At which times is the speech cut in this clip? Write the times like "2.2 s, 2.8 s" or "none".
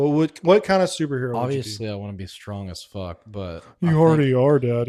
none